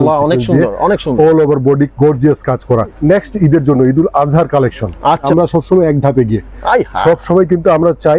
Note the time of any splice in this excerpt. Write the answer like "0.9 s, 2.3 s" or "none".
2.9 s, 5.3 s